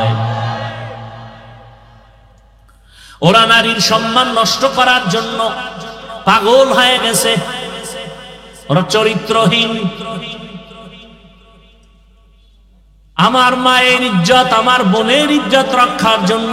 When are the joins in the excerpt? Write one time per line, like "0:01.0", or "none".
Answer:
none

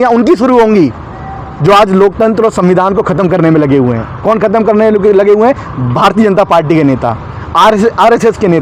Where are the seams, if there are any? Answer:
none

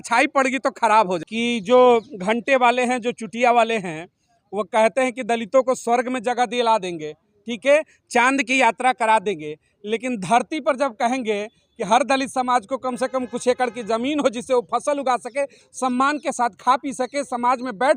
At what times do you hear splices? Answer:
0:01.3

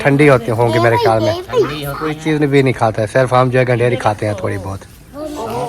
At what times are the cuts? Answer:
0:02.2

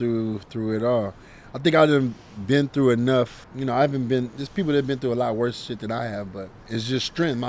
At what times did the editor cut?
0:03.4
0:06.5

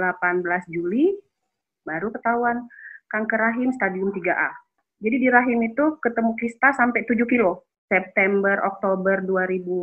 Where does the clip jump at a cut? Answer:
0:04.8
0:07.7

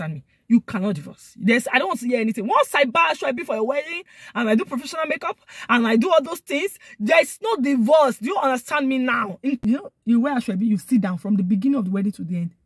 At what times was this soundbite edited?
0:09.6

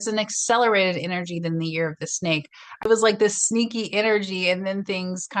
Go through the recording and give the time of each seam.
0:02.9

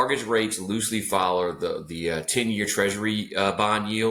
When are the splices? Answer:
none

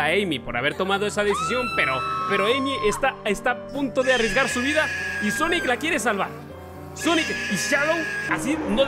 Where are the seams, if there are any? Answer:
0:02.2

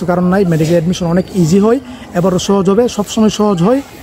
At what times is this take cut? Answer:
none

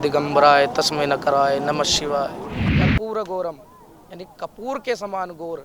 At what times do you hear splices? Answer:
0:02.7

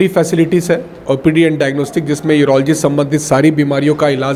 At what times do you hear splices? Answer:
none

